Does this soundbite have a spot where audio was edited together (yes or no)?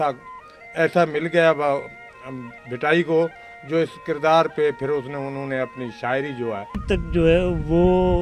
yes